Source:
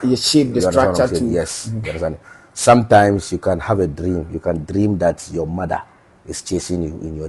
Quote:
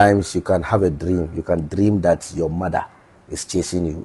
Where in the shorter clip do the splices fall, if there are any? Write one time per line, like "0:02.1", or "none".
none